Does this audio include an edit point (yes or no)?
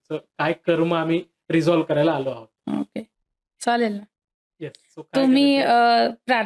no